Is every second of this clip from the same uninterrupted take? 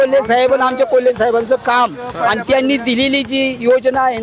yes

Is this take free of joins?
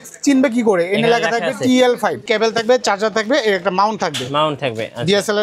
no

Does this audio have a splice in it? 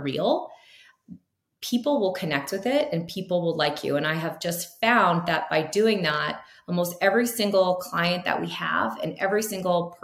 no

